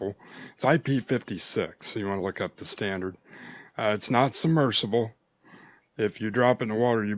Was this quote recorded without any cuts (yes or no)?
yes